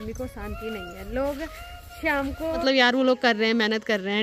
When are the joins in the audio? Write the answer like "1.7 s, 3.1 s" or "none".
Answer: 2.6 s